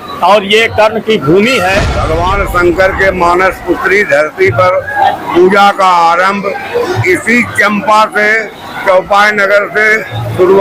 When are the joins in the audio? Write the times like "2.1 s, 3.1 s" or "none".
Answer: 2.0 s, 5.2 s, 7.0 s